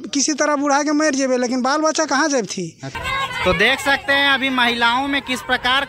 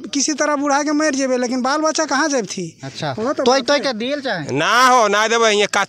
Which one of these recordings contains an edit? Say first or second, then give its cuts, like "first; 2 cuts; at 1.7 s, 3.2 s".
first; 1 cut; at 3.0 s